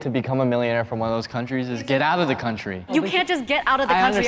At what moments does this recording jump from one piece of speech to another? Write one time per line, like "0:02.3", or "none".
0:02.9